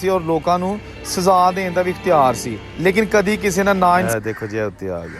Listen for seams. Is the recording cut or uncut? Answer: cut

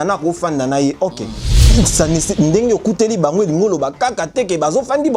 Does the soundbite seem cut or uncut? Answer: cut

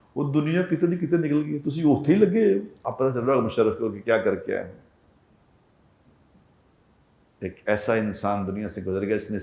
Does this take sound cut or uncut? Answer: cut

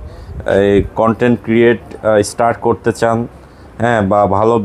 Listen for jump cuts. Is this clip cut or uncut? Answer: uncut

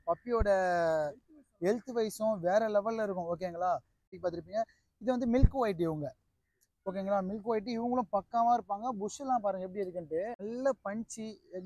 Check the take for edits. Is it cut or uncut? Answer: cut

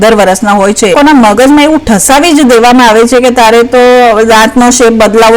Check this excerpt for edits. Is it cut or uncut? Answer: cut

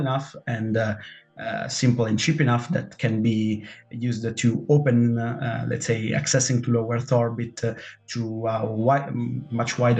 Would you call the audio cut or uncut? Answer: uncut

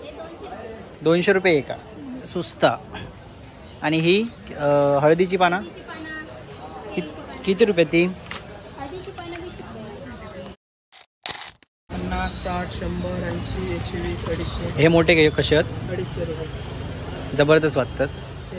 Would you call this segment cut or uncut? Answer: uncut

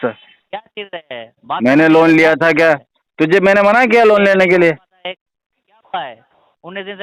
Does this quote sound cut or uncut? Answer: uncut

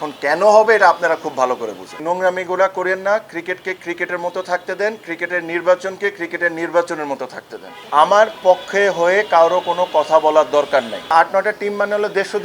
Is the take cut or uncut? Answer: cut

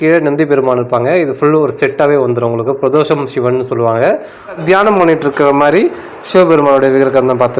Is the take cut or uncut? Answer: cut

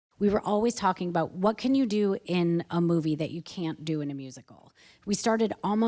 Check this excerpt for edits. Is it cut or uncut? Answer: uncut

